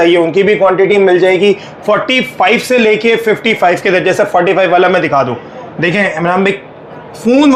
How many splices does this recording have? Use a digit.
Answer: 0